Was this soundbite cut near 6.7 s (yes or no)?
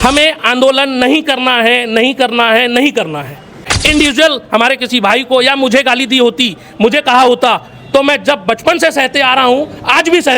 no